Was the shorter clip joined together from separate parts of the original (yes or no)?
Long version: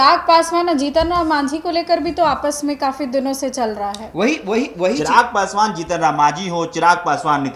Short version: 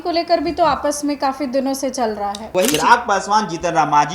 yes